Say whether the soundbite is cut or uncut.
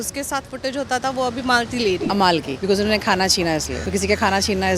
cut